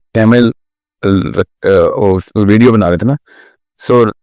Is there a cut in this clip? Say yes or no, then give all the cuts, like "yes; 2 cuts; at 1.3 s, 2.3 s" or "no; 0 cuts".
no; 0 cuts